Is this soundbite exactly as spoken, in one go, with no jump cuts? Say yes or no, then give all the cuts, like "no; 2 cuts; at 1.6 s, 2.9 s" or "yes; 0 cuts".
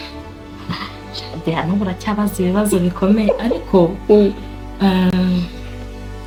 yes; 0 cuts